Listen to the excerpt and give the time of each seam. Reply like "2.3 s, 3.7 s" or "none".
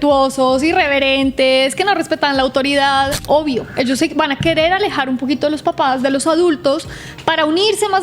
3.2 s